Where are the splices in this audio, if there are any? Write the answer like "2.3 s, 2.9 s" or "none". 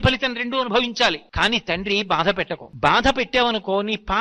1.3 s, 2.6 s